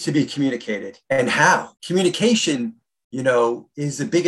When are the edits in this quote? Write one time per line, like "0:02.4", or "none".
0:00.9
0:01.8